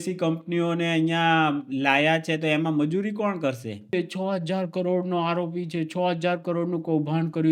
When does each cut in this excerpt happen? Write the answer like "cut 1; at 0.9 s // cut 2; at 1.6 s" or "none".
cut 1; at 3.9 s